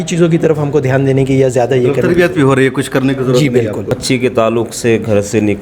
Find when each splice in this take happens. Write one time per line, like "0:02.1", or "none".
0:03.9